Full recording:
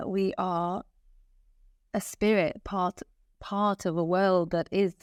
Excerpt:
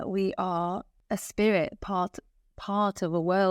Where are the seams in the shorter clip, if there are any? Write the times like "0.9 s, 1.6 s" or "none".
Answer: 0.9 s